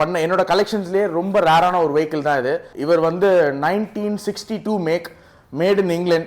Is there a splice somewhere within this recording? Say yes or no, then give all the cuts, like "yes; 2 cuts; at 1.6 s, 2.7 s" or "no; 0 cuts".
yes; 1 cut; at 2.7 s